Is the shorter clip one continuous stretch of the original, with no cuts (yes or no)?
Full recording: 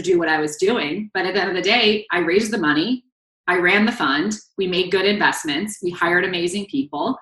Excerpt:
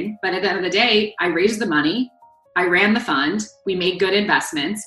yes